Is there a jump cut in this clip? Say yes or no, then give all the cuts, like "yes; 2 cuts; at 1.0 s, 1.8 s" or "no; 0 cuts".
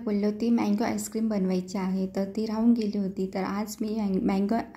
no; 0 cuts